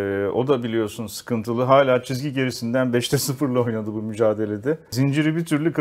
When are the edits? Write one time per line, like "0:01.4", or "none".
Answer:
0:04.9

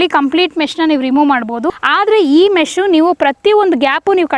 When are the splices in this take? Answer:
0:01.8

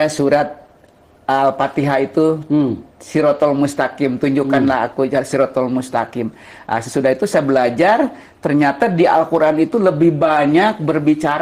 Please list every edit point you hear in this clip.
none

